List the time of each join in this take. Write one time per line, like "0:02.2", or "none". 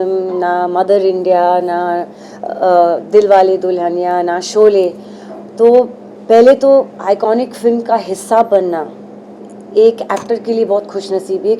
none